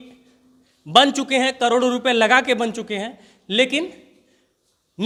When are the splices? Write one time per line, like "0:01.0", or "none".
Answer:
none